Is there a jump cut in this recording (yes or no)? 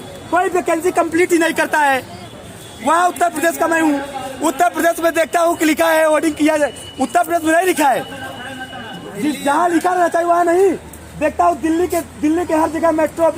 no